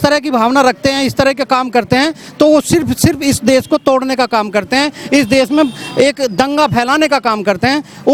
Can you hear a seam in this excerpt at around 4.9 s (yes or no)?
no